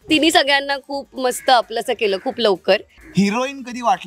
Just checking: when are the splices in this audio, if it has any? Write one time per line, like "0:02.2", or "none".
0:03.0